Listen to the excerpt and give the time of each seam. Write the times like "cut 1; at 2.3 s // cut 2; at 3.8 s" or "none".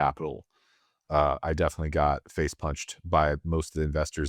none